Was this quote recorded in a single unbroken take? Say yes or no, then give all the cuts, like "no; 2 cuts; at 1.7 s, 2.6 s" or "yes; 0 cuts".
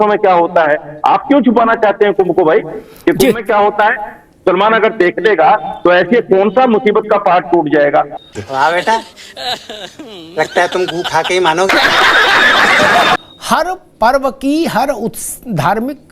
yes; 0 cuts